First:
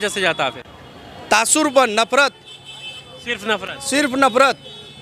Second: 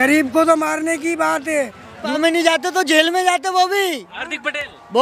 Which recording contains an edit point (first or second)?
second